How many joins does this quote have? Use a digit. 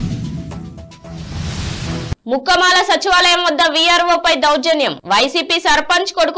1